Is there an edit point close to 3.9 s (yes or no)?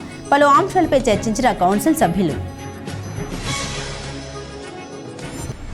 no